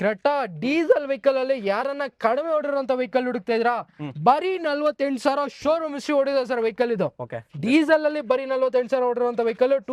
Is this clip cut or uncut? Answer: uncut